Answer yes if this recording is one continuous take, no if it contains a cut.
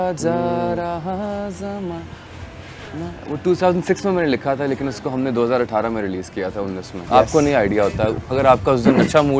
no